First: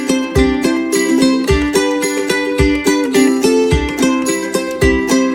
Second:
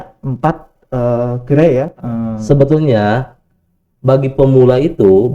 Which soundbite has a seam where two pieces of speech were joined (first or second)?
second